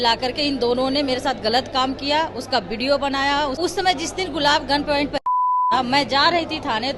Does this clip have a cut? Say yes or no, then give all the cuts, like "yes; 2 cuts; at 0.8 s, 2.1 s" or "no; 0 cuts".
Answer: yes; 1 cut; at 3.6 s